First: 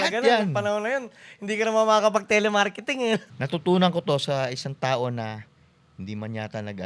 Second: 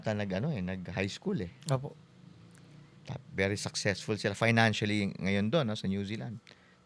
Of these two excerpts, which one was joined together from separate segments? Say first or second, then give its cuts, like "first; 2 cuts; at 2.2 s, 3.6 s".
first; 1 cut; at 3.3 s